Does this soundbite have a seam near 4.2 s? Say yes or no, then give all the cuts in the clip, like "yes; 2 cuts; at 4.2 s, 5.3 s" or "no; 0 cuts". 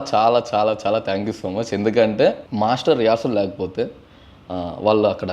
no; 1 cut; at 2.5 s